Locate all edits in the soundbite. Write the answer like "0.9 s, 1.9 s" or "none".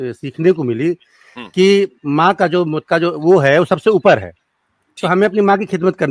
2.8 s